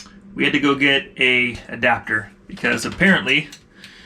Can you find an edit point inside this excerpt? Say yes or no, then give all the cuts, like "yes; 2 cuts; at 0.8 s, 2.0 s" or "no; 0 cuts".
no; 0 cuts